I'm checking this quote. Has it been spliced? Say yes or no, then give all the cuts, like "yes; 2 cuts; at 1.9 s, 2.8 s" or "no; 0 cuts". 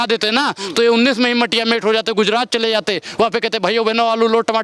no; 0 cuts